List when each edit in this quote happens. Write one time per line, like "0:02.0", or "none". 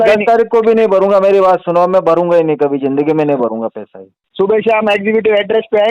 0:04.2